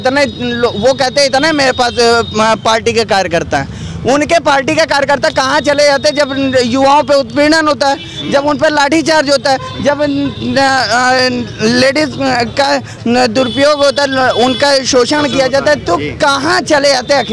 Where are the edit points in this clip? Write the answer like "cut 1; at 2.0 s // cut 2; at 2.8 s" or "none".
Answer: none